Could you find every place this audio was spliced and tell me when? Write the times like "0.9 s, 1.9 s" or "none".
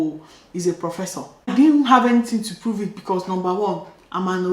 1.5 s